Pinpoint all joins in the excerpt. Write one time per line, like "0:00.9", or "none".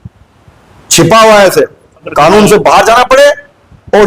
0:02.1